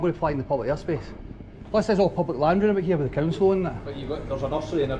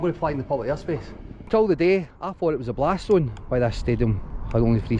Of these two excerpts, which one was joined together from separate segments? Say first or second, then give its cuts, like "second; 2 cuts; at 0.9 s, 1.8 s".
second; 1 cut; at 1.5 s